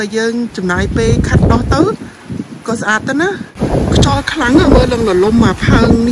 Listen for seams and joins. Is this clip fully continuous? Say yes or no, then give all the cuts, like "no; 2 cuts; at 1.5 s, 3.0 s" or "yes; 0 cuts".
no; 1 cut; at 3.5 s